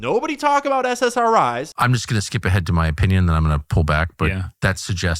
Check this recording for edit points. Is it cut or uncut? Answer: cut